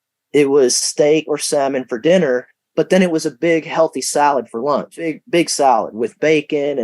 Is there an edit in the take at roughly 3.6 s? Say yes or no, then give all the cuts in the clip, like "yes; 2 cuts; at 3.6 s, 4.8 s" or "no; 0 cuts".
no; 1 cut; at 4.9 s